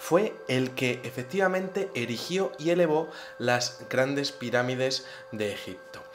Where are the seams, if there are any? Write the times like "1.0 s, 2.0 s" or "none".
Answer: none